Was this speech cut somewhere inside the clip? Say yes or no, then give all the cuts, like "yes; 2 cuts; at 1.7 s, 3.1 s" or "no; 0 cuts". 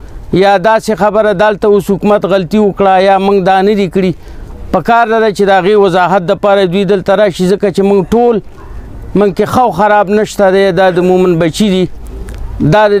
no; 0 cuts